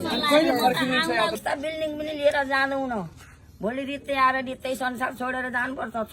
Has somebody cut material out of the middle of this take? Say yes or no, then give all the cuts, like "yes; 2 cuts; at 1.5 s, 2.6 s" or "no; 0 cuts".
yes; 1 cut; at 1.4 s